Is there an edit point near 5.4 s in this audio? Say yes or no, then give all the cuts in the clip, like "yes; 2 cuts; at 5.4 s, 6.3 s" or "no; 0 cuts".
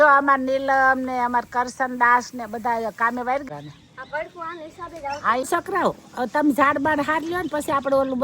yes; 2 cuts; at 3.4 s, 5.4 s